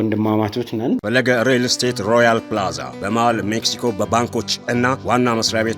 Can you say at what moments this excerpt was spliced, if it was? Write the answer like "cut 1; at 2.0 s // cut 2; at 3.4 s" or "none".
cut 1; at 1.0 s